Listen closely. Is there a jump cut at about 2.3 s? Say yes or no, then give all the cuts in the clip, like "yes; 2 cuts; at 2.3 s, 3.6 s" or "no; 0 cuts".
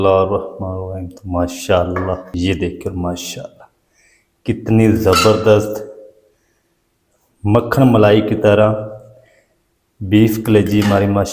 yes; 1 cut; at 2.3 s